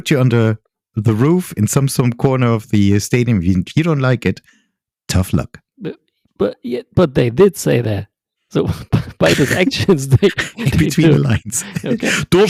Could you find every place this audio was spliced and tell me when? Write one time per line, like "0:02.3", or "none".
none